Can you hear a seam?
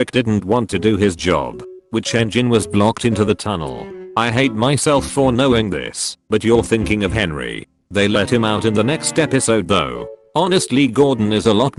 no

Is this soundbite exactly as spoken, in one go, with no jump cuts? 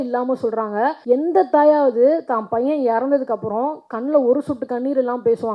no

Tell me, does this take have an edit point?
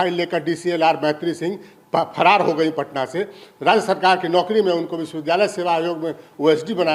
no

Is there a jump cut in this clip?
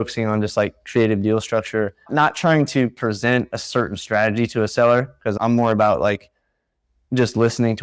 no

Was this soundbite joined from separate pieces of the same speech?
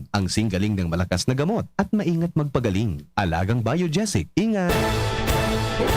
yes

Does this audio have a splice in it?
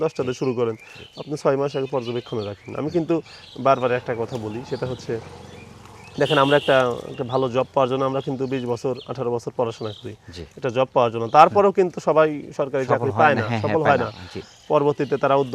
no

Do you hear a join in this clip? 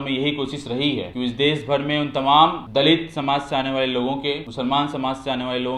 yes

